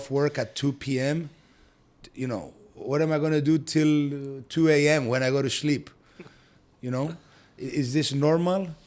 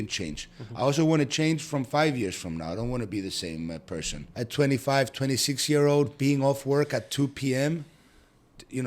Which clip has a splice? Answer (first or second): second